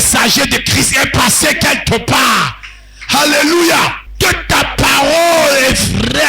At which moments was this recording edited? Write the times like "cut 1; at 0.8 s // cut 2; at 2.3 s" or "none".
cut 1; at 4.0 s